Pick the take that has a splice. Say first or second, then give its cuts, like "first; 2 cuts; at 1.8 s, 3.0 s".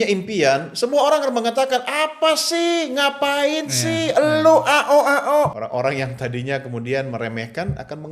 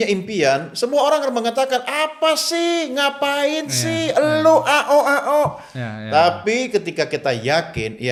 first; 1 cut; at 5.6 s